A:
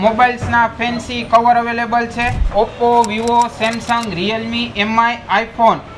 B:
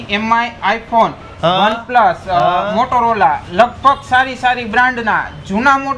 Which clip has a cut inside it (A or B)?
A